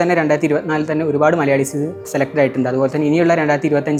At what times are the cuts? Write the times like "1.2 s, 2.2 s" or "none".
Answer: none